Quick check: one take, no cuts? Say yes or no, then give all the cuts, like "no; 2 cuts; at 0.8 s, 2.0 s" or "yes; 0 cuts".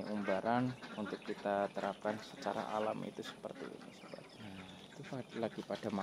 no; 1 cut; at 4.3 s